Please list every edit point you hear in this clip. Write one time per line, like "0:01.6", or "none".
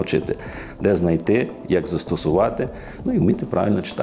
none